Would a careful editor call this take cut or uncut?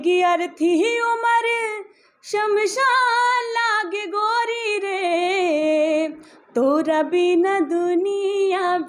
uncut